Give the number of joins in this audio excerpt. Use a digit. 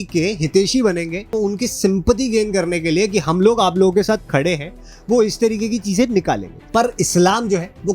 1